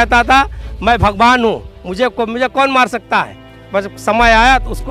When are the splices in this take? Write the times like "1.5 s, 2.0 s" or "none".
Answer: none